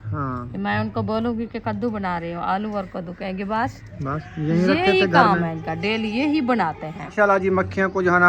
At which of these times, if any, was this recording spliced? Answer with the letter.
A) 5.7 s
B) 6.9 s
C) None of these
B